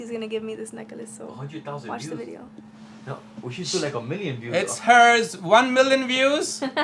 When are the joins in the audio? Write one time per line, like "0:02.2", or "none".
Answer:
none